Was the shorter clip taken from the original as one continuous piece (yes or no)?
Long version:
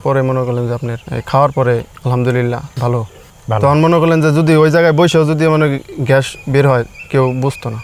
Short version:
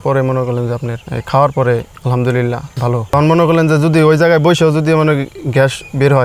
no